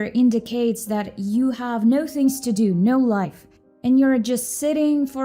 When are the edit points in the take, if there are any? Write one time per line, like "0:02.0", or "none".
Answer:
none